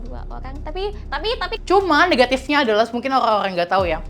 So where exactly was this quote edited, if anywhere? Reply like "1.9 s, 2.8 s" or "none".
1.5 s